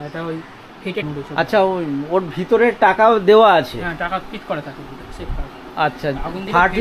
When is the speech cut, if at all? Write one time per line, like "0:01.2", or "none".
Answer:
0:01.0